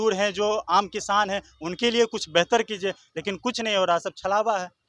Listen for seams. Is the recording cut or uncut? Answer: uncut